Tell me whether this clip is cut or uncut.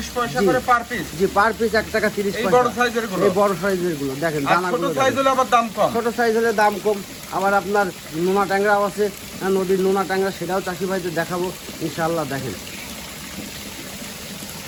uncut